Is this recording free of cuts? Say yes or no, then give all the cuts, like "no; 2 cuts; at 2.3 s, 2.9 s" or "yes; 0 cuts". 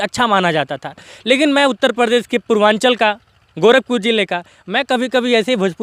yes; 0 cuts